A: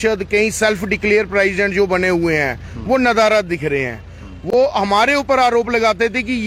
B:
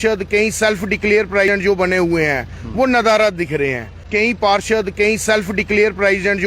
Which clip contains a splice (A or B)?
B